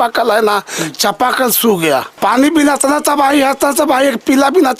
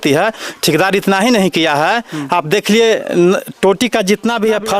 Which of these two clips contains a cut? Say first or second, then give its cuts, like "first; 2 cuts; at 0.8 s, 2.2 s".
first; 1 cut; at 2.2 s